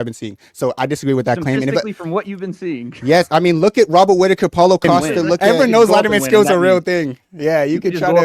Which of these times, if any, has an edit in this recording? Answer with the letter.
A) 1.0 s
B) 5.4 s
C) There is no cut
B